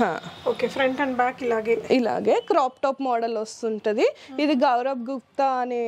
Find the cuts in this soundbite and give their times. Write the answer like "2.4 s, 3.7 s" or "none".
none

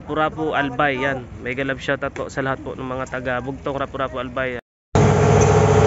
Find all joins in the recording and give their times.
4.7 s

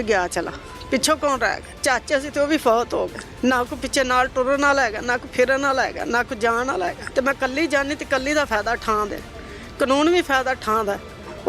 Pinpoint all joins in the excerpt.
1.7 s, 3.2 s, 7.0 s

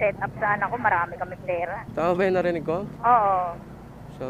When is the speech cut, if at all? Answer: 1.8 s, 2.9 s

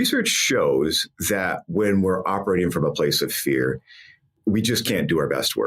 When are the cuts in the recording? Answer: 4.3 s

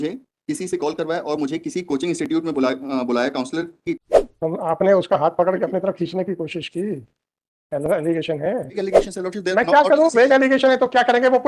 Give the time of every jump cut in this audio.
4.0 s, 8.8 s

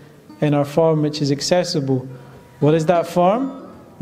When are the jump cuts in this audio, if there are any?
none

